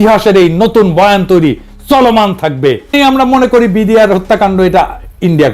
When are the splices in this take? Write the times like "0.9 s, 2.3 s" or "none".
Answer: 2.9 s